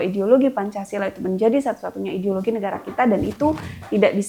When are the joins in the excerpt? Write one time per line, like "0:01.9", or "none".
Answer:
none